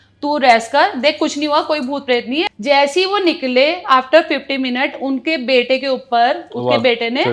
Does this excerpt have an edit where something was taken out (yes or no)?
yes